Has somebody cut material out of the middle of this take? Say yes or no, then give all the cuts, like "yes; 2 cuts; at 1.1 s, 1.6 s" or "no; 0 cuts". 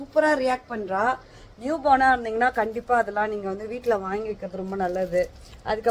no; 0 cuts